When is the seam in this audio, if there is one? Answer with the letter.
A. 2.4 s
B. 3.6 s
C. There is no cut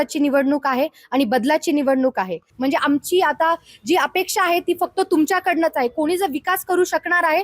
A